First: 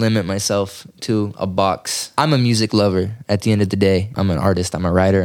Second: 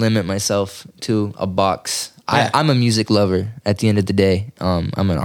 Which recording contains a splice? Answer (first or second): first